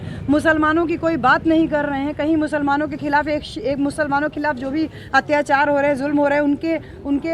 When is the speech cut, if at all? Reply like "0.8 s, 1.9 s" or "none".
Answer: none